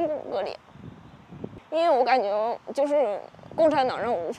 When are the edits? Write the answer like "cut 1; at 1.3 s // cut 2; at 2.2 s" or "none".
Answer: cut 1; at 1.6 s

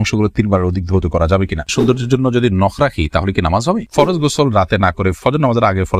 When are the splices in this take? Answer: cut 1; at 1.7 s // cut 2; at 3.9 s

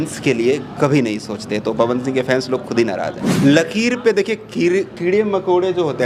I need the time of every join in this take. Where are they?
cut 1; at 3.2 s

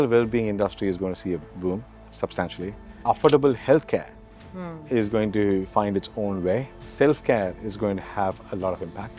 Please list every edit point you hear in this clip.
cut 1; at 1.4 s // cut 2; at 6.8 s

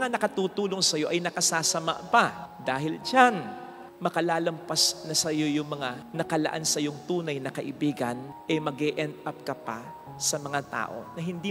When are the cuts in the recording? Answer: none

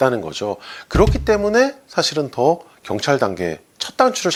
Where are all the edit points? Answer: none

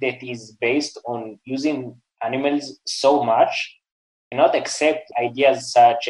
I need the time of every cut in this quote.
none

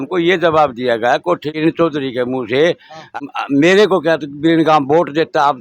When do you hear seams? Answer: cut 1; at 1.5 s // cut 2; at 3.1 s

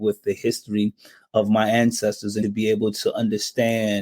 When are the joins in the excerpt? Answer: cut 1; at 2.4 s

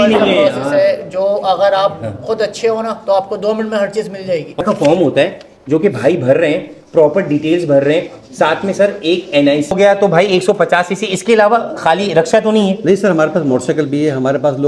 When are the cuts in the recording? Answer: cut 1; at 4.6 s // cut 2; at 9.7 s

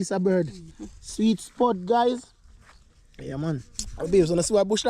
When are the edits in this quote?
cut 1; at 3.8 s

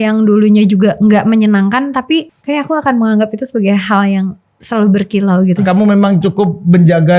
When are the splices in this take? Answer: cut 1; at 2.3 s // cut 2; at 5.6 s

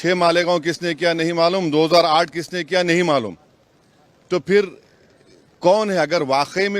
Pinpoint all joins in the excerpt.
none

